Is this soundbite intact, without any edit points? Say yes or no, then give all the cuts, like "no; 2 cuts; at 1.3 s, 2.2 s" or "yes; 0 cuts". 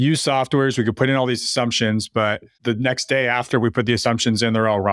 yes; 0 cuts